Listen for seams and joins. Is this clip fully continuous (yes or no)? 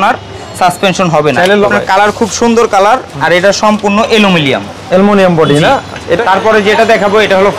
no